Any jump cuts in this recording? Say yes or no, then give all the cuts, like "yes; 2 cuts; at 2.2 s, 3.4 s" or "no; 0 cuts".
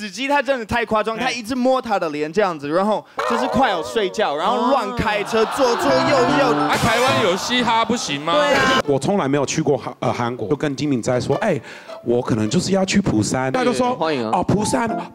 yes; 3 cuts; at 8.8 s, 10.5 s, 13.5 s